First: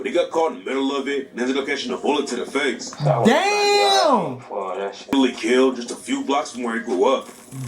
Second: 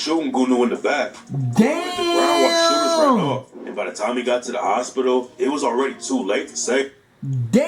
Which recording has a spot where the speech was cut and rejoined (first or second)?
first